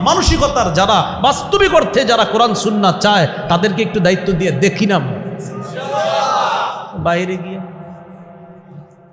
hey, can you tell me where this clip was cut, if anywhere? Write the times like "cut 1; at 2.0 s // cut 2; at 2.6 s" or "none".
none